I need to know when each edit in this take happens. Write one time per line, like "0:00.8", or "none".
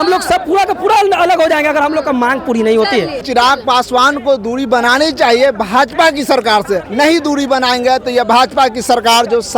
0:03.2
0:06.9